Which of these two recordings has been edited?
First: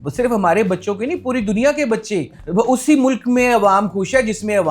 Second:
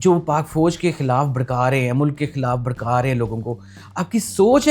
first; 1 cut; at 2.4 s

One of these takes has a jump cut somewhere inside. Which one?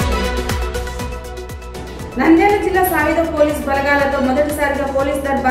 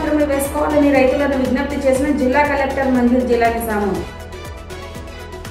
first; 1 cut; at 0.9 s

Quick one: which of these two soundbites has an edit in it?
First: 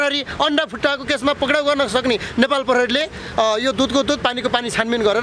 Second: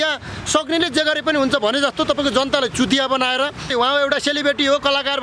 second; 1 cut; at 3.7 s

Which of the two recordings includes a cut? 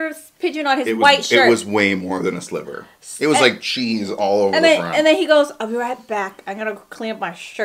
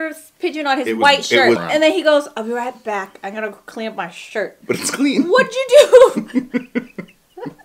second; 2 cuts; at 1.6 s, 4.6 s

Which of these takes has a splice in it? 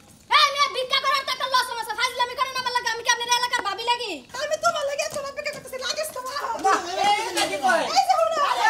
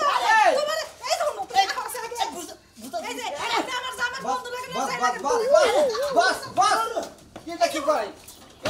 first; 1 cut; at 4.3 s

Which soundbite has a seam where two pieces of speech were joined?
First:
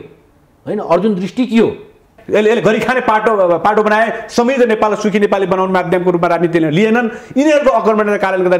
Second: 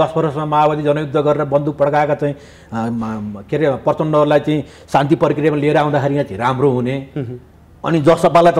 first; 1 cut; at 2.1 s

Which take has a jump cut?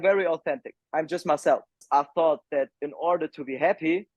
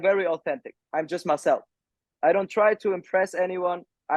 first; 1 cut; at 1.8 s

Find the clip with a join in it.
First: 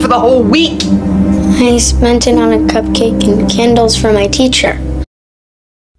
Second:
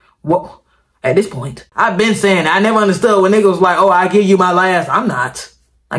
second; 1 cut; at 1.6 s

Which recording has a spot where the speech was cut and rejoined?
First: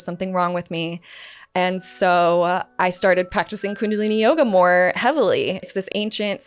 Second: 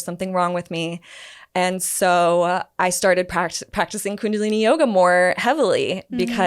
first; 2 cuts; at 3.3 s, 5.7 s

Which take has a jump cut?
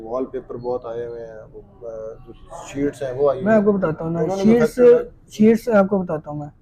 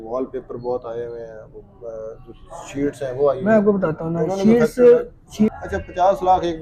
second; 1 cut; at 5.5 s

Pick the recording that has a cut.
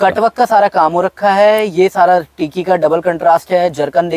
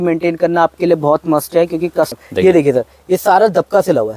second; 1 cut; at 2.1 s

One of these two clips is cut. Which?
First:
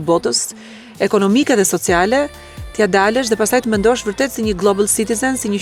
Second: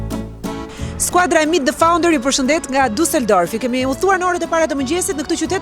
second; 1 cut; at 1.0 s

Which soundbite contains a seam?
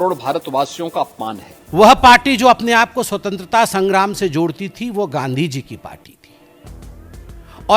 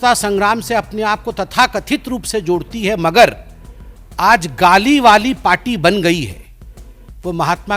first; 1 cut; at 1.5 s

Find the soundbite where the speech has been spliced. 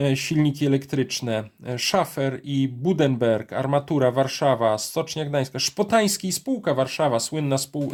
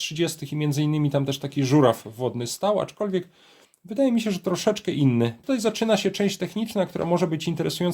second; 1 cut; at 5.4 s

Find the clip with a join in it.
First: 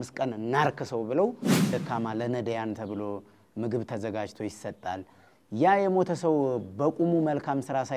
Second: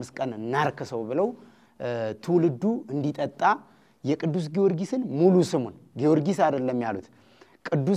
first; 1 cut; at 1.7 s

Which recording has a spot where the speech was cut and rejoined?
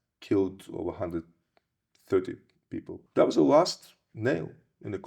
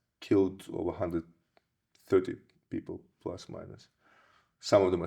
first; 1 cut; at 3.0 s

